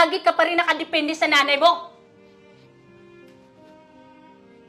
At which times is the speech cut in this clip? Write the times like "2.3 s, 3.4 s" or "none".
1.9 s

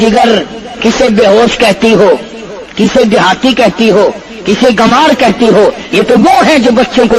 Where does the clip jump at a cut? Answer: none

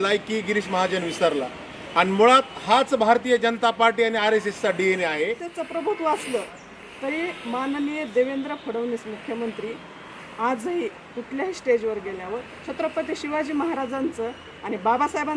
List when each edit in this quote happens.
5.5 s

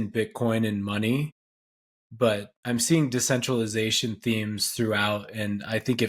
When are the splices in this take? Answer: none

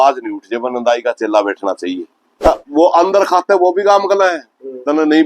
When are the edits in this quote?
2.5 s

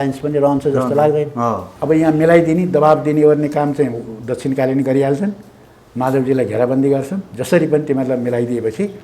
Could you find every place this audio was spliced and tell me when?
1.7 s

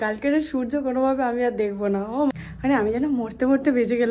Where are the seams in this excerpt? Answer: 2.3 s

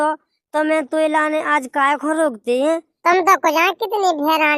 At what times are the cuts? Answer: 2.9 s

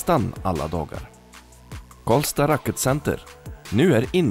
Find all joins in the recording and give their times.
none

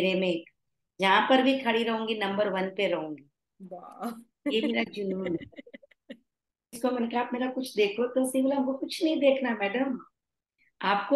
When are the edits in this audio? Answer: 6.8 s

